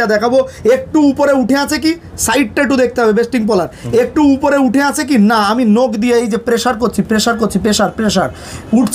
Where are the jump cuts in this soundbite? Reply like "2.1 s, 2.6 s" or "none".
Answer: none